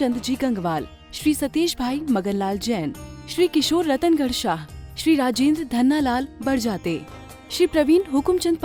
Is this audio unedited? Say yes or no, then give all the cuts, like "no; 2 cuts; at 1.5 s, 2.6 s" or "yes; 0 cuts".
yes; 0 cuts